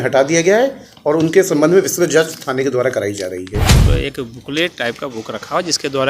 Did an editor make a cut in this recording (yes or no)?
yes